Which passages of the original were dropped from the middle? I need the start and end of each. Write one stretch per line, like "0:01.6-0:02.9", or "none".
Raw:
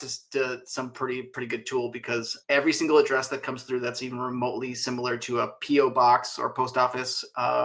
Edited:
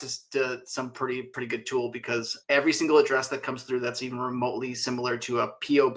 none